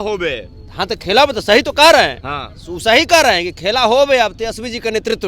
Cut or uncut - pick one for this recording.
uncut